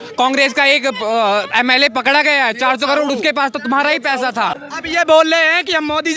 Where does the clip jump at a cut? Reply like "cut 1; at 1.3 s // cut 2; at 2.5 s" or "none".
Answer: cut 1; at 4.7 s